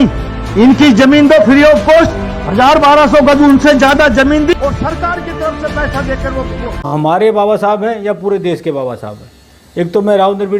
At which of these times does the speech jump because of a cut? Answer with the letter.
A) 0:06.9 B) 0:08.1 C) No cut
A